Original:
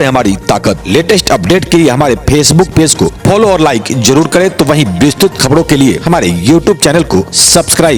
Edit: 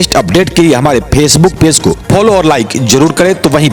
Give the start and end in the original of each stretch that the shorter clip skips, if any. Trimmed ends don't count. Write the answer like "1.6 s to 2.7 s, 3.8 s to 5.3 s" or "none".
none